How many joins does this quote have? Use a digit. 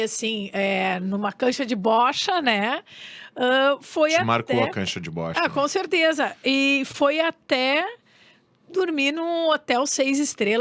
0